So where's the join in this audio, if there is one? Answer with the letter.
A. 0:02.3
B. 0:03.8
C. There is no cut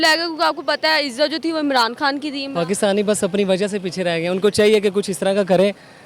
A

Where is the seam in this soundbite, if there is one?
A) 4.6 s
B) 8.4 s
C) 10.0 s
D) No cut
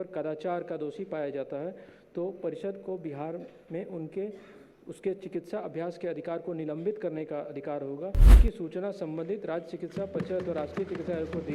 B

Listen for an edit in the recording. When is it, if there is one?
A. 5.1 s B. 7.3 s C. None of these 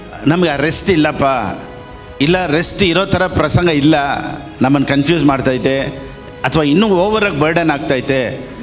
C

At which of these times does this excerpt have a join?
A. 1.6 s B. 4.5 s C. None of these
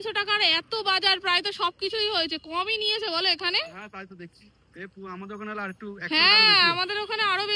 C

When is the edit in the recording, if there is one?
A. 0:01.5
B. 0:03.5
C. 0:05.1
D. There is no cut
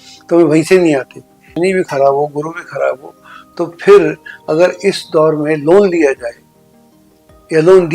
A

